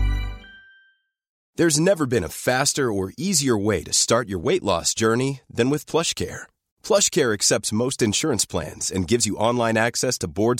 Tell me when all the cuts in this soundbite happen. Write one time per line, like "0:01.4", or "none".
0:01.3

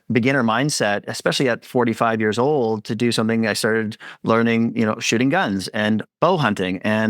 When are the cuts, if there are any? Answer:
0:06.1

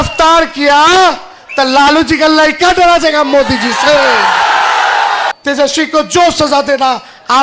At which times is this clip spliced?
0:05.3

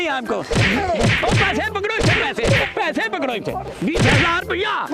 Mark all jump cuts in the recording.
none

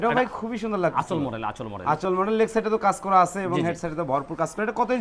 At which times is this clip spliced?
none

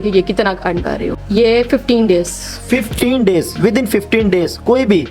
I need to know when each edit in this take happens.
0:01.1

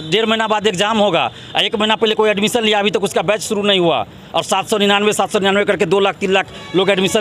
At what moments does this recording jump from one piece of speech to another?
none

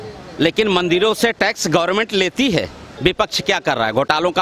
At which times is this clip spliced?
0:02.9

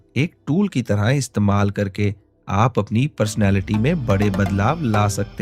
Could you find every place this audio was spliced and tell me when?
none

